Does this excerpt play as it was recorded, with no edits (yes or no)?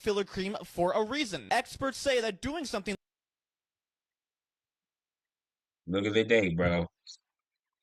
yes